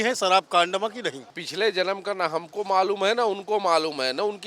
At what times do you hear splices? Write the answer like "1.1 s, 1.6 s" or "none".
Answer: 1.4 s